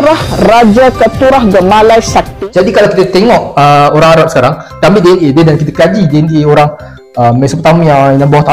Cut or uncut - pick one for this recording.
cut